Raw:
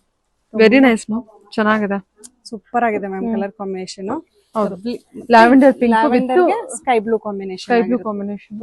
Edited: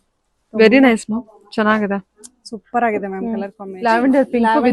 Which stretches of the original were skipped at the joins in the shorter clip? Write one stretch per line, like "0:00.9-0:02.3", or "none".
0:03.6-0:05.1